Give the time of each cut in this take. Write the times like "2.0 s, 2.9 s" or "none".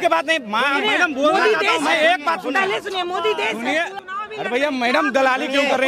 4.0 s